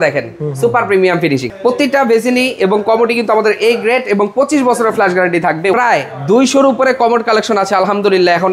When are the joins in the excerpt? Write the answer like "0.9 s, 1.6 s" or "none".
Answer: 1.5 s, 5.7 s